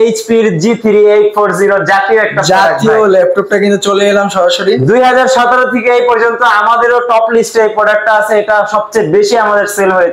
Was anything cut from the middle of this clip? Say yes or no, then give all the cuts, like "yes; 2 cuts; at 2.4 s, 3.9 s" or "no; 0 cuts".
no; 0 cuts